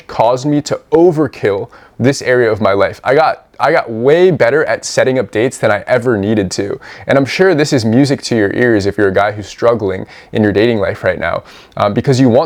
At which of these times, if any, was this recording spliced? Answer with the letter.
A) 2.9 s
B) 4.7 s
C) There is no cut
C